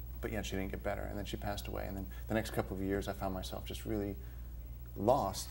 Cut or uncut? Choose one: uncut